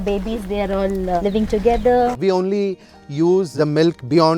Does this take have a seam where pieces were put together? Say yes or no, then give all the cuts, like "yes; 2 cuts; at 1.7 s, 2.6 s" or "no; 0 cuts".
yes; 2 cuts; at 1.2 s, 2.2 s